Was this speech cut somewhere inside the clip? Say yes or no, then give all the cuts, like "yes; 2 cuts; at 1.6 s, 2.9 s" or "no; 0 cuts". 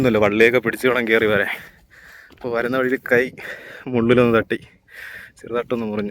no; 0 cuts